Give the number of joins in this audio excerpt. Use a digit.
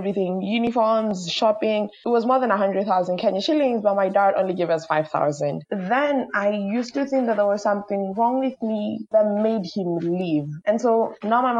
3